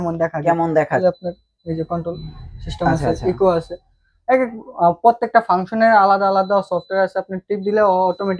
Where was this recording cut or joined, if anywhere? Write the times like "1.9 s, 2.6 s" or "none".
1.0 s